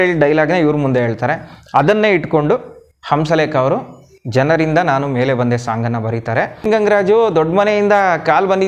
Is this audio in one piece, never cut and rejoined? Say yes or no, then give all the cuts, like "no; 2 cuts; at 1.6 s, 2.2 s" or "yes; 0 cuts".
no; 1 cut; at 6.6 s